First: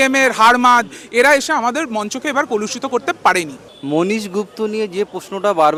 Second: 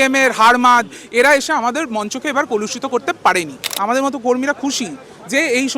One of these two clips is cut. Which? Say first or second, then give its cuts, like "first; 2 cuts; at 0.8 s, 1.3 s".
second; 1 cut; at 3.7 s